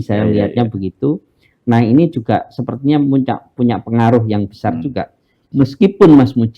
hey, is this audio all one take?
yes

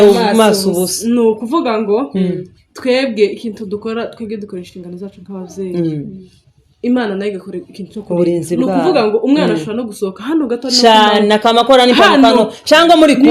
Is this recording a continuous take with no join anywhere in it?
yes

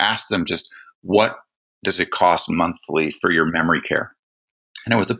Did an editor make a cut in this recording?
yes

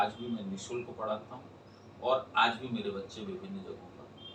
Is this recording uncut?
yes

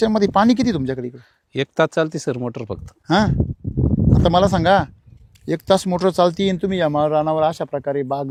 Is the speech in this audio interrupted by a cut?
no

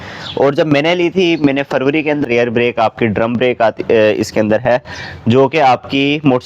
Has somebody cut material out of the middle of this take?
yes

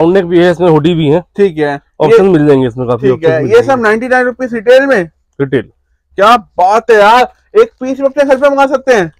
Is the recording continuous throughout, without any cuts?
yes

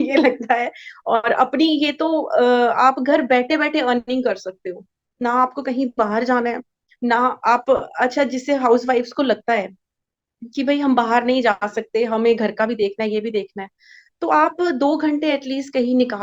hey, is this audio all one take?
yes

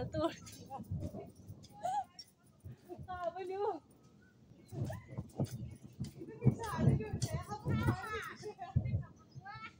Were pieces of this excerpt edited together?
no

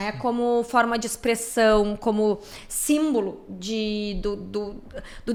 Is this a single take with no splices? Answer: yes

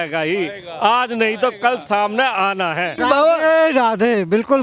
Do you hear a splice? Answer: yes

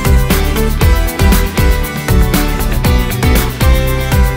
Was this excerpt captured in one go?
yes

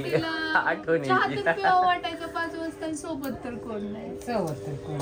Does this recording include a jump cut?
no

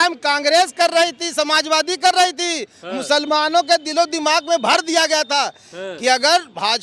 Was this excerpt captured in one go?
yes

